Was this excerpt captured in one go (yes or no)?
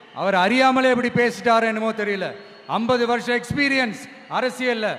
yes